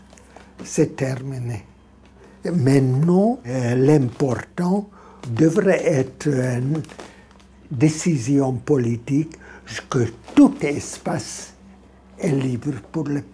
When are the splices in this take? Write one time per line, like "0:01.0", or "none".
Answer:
0:02.3
0:03.5
0:05.3